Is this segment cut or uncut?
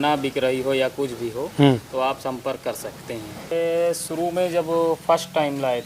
cut